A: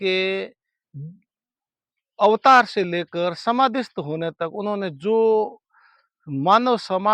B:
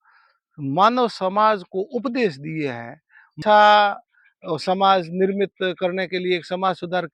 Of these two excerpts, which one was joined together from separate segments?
B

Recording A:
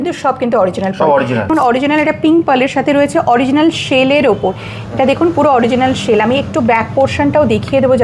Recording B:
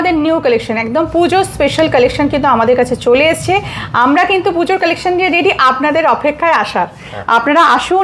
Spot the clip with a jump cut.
A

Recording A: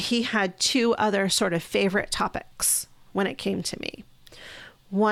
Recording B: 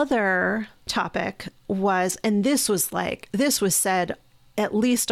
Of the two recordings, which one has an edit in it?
B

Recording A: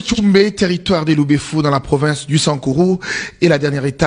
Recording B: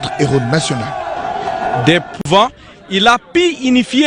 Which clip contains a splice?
B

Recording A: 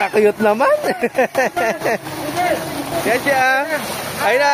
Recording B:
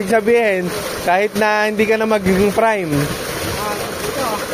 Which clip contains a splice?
A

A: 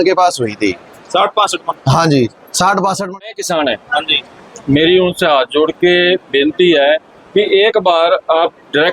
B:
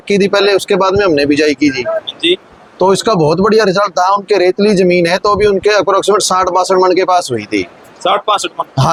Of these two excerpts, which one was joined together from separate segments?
A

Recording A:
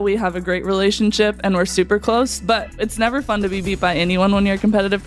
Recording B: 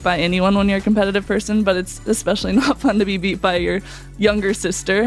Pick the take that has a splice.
A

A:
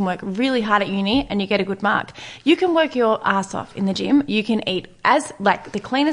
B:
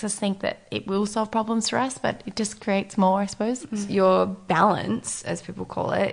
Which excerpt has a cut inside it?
B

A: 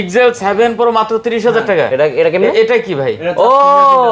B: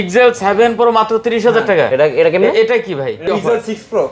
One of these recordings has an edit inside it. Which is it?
B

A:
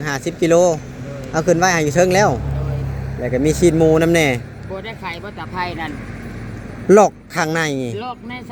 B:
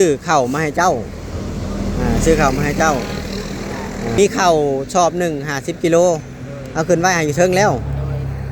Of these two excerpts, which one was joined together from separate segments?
B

